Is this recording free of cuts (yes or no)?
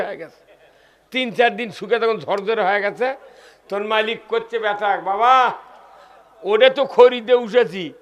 yes